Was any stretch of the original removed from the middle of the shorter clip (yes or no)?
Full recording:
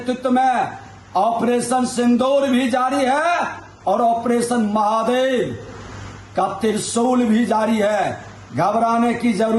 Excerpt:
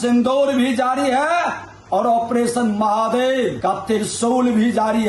yes